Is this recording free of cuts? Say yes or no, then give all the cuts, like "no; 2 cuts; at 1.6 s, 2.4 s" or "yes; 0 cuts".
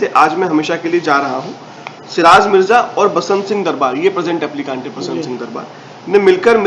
yes; 0 cuts